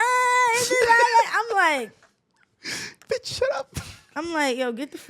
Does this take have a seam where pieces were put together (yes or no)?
no